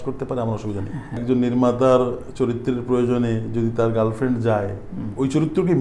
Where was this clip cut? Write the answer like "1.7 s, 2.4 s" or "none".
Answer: 1.2 s